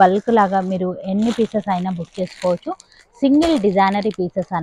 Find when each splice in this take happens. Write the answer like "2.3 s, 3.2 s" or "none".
none